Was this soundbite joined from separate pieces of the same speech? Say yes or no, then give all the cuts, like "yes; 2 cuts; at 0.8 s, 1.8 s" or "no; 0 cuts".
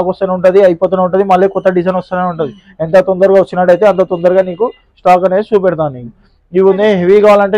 no; 0 cuts